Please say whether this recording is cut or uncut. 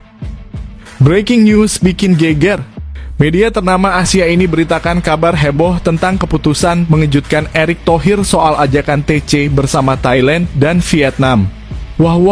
cut